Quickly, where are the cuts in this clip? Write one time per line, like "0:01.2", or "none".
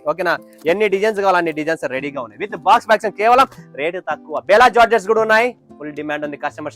none